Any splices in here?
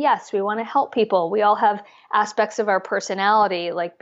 no; 0 cuts

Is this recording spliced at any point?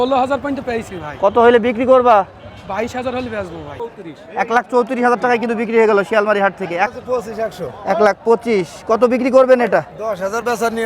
yes; 2 cuts; at 3.8 s, 6.9 s

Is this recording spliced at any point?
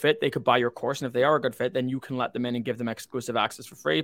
no; 0 cuts

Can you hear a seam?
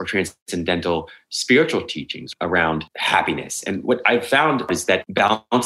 yes; 2 cuts; at 2.7 s, 4.7 s

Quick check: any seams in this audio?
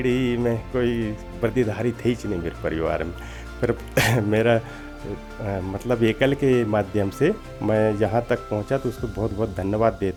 no; 0 cuts

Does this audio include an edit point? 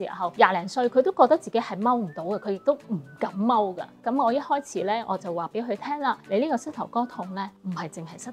yes; 3 cuts; at 3.9 s, 6.2 s, 7.6 s

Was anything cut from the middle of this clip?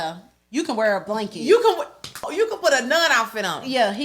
yes; 1 cut; at 2.3 s

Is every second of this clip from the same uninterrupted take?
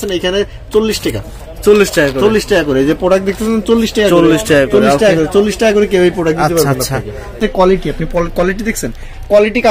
no; 1 cut; at 7.3 s

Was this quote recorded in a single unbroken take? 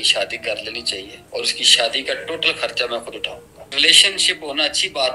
no; 2 cuts; at 1.2 s, 3.7 s

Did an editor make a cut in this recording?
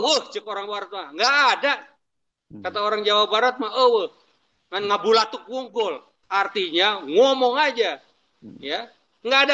no; 0 cuts

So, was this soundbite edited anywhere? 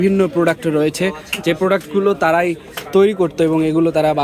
no; 0 cuts

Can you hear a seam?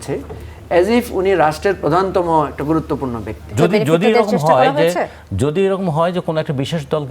yes; 1 cut; at 3.5 s

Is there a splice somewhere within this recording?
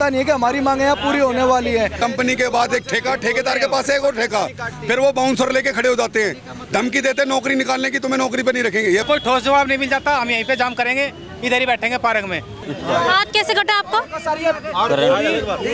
yes; 3 cuts; at 2.0 s, 9.0 s, 12.6 s

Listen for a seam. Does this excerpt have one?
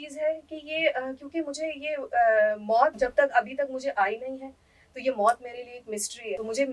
no; 0 cuts

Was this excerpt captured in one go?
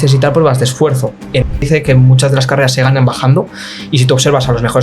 no; 1 cut; at 1.6 s

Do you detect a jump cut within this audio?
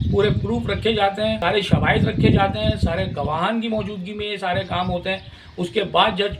yes; 1 cut; at 1.4 s

